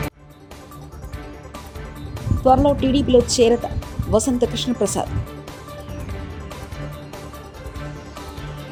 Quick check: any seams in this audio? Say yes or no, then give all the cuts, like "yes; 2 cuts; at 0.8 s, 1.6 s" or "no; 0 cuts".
no; 0 cuts